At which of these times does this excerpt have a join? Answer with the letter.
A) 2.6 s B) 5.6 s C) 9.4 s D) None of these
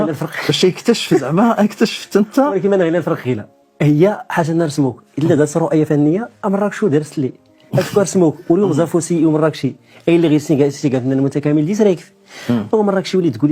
D